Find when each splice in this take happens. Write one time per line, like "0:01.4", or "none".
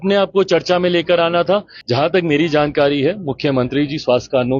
0:01.8